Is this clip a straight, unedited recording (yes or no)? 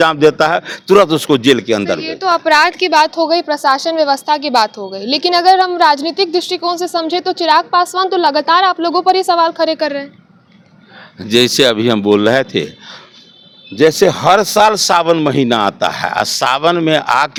yes